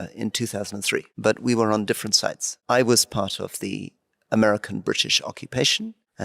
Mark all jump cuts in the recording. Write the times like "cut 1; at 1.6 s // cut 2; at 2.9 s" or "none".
cut 1; at 1.1 s // cut 2; at 2.5 s